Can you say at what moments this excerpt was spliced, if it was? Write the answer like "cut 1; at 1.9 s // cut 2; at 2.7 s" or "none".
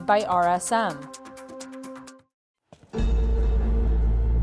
cut 1; at 1.0 s // cut 2; at 2.1 s